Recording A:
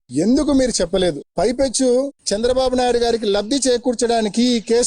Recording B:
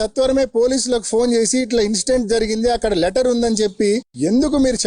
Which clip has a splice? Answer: A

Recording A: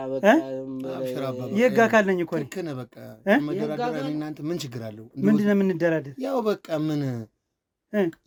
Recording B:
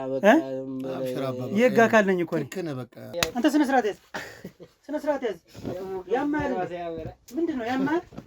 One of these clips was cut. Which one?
B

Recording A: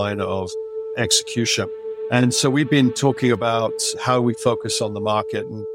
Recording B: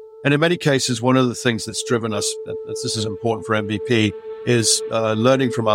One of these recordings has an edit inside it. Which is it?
A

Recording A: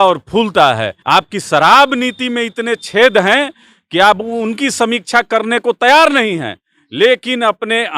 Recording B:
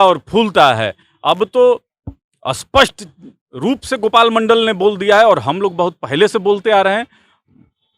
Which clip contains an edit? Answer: A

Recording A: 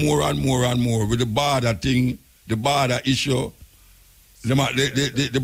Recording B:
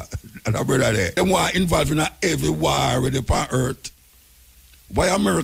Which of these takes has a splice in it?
B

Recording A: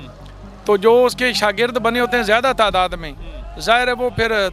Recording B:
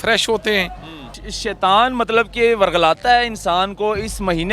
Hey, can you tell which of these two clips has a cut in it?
B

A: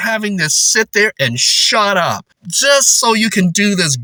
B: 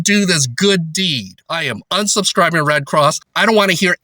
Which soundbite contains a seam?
B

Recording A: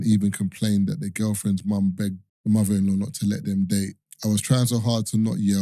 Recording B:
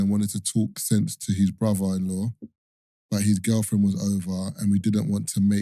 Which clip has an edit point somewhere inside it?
A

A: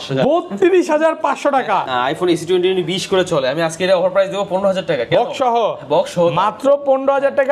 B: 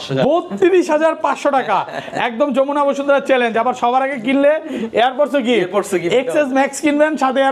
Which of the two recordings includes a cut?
A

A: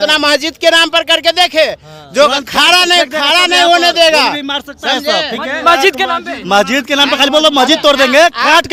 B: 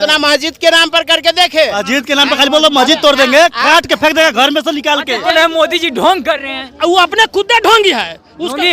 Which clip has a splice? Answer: B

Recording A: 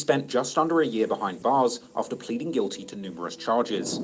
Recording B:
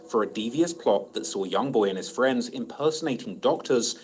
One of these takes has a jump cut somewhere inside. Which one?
A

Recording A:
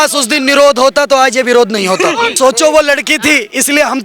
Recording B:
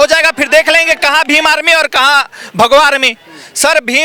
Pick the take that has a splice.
A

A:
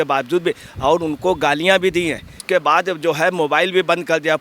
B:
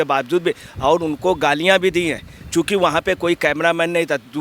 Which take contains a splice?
A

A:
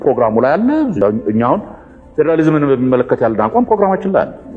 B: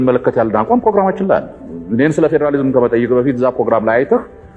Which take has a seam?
A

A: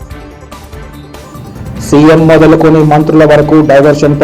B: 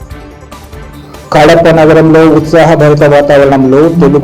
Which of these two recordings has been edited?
B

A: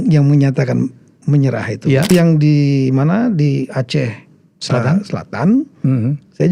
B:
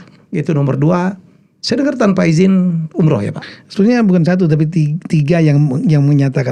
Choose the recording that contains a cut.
A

